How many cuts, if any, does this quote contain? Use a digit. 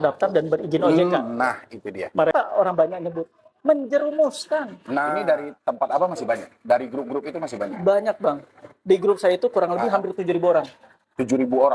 2